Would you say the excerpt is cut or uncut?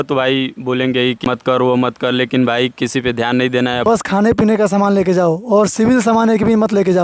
cut